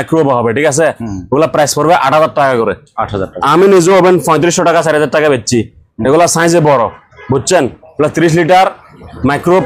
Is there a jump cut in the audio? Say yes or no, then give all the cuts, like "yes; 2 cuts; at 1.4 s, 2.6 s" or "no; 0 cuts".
no; 0 cuts